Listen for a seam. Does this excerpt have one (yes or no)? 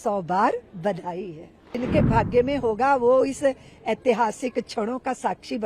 yes